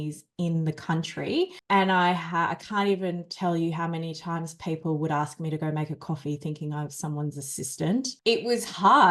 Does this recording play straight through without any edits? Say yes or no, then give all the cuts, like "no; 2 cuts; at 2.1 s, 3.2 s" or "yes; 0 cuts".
no; 2 cuts; at 1.6 s, 8.1 s